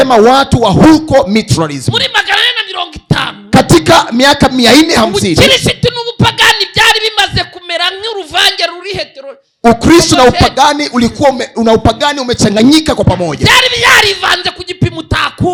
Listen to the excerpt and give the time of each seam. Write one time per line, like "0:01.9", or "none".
none